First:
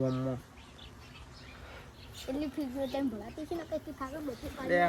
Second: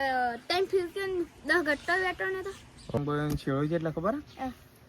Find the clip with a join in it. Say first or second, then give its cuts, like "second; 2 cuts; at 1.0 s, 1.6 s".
second; 1 cut; at 3.0 s